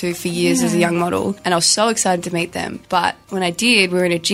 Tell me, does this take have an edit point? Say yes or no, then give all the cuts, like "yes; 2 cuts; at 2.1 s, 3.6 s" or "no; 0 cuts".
yes; 2 cuts; at 1.4 s, 2.7 s